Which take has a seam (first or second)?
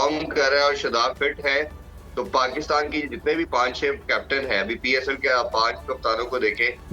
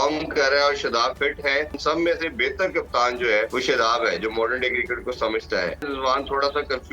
second